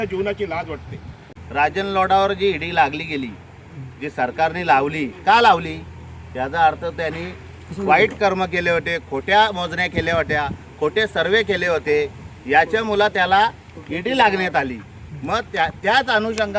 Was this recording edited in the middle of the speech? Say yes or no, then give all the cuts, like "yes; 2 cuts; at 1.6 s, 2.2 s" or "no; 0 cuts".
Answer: yes; 1 cut; at 1.3 s